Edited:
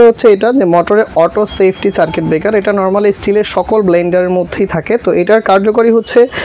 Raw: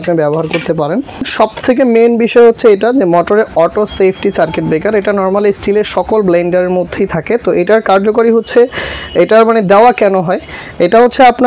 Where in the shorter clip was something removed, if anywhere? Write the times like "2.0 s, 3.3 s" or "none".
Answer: none